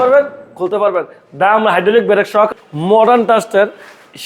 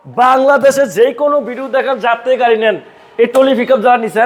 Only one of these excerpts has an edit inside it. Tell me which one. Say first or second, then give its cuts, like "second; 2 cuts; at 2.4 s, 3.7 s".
first; 1 cut; at 2.5 s